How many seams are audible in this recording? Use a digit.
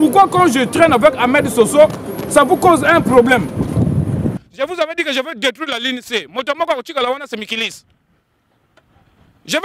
1